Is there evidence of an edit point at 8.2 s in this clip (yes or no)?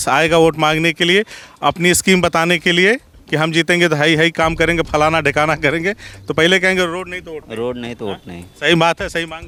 no